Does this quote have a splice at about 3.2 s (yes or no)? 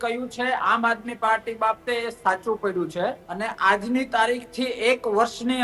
yes